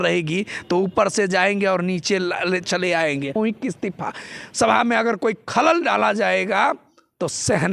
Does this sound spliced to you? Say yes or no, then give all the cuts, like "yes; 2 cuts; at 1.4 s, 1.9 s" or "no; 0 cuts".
yes; 1 cut; at 3.3 s